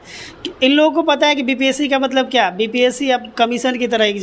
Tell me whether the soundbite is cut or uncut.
uncut